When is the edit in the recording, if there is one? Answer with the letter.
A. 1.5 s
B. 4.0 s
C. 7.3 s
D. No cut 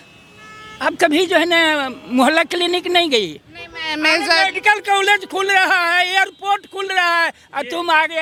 D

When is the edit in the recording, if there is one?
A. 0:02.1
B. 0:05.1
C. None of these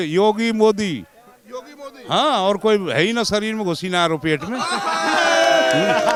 C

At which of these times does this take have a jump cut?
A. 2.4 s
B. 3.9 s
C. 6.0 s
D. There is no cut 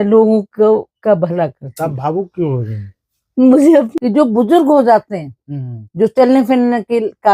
B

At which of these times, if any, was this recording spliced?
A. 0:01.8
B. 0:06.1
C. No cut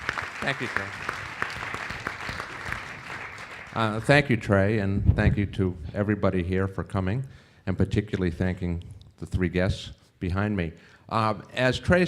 B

